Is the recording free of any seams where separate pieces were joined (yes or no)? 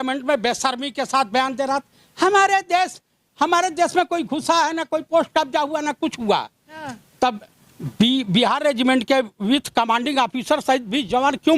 yes